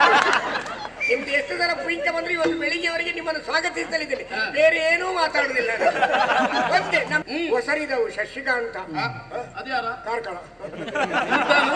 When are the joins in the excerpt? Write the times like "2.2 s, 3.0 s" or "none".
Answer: 7.2 s